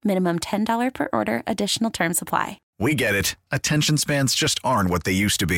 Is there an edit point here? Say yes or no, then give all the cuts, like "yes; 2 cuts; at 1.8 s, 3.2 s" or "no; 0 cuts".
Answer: yes; 1 cut; at 2.6 s